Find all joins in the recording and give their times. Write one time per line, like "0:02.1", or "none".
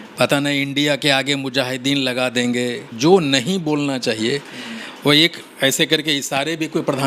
0:02.9